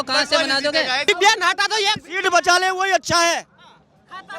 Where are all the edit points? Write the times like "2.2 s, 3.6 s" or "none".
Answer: 1.1 s